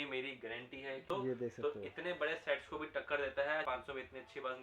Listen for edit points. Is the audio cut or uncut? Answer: cut